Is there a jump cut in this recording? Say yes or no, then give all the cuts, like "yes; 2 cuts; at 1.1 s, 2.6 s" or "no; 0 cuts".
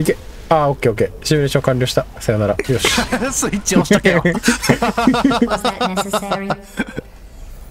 no; 0 cuts